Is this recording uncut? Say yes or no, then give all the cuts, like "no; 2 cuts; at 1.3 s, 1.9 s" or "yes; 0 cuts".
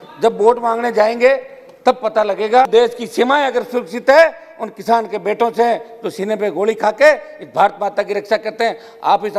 no; 1 cut; at 2.7 s